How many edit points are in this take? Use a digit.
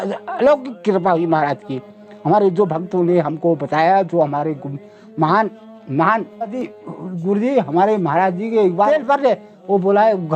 1